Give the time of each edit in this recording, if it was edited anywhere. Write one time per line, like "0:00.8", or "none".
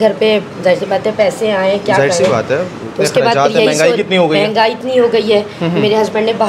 none